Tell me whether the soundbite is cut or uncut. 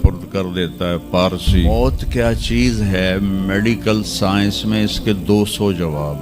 cut